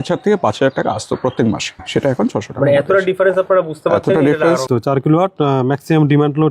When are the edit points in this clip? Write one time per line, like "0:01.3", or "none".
0:01.8
0:04.6